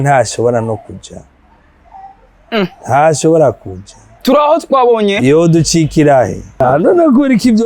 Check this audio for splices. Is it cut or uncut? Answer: cut